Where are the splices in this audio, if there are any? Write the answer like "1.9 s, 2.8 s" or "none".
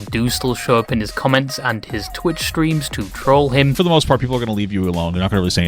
3.7 s